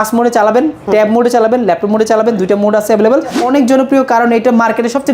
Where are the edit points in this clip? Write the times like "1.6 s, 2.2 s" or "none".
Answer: 3.4 s